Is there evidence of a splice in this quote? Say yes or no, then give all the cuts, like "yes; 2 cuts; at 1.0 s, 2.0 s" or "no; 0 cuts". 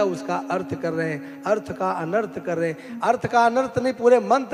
no; 0 cuts